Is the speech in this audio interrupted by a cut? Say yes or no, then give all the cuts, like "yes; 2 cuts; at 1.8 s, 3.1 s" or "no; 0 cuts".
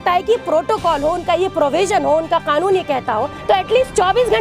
yes; 1 cut; at 3.3 s